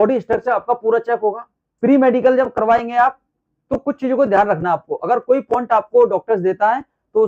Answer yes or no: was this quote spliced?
yes